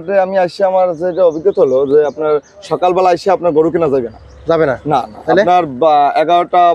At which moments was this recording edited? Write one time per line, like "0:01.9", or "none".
none